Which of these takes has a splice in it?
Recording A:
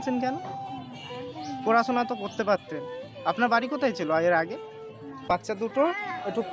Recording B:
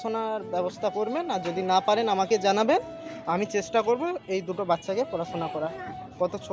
A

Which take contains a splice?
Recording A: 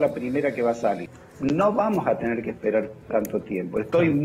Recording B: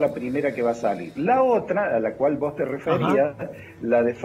A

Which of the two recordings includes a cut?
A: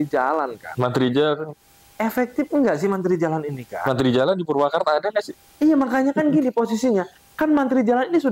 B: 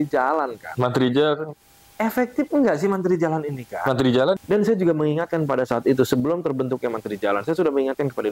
B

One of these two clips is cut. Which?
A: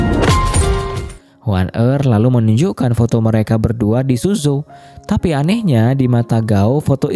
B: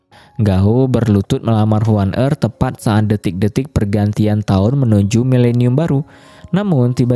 A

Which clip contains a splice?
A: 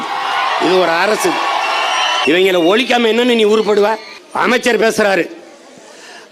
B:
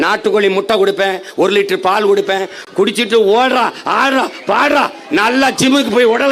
A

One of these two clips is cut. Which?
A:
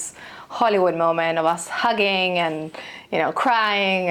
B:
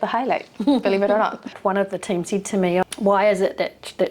B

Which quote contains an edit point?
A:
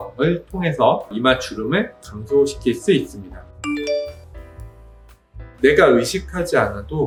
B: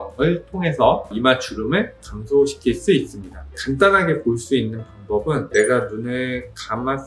B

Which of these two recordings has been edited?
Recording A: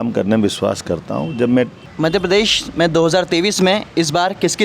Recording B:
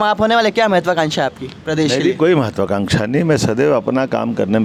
A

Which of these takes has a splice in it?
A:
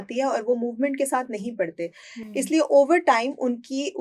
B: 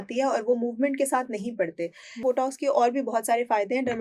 B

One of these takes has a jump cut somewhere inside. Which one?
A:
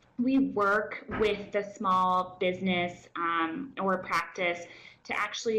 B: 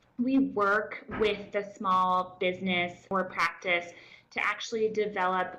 B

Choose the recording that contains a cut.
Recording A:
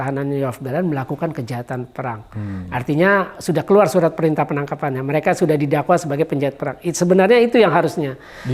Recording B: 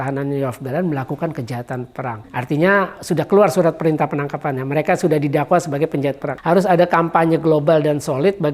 B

